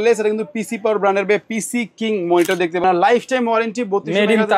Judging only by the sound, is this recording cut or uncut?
cut